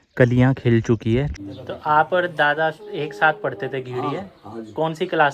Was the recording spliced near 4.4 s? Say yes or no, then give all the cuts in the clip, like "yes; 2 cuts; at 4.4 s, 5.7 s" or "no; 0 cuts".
no; 1 cut; at 1.4 s